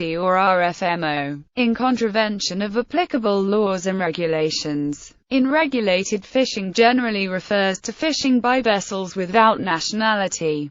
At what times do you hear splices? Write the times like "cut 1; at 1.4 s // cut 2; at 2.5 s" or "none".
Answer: cut 1; at 7.6 s